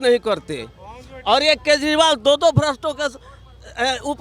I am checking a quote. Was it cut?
no; 0 cuts

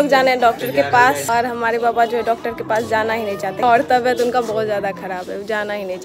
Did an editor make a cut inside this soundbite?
yes; 1 cut; at 3.6 s

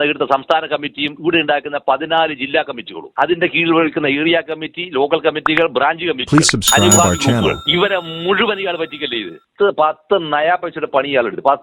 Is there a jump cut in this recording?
yes; 1 cut; at 9.5 s

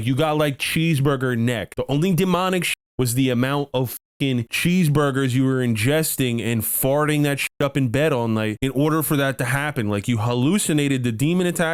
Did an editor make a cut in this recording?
no; 0 cuts

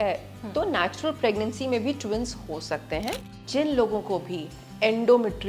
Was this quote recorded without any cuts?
no; 1 cut; at 3.4 s

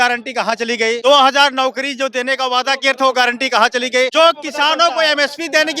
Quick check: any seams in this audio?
yes; 2 cuts; at 1.0 s, 4.1 s

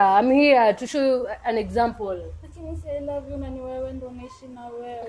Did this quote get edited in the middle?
no; 0 cuts

